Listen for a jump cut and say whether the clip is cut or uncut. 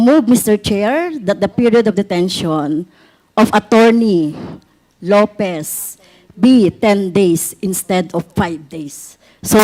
uncut